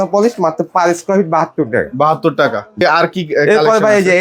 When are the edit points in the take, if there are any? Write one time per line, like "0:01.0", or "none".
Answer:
0:02.8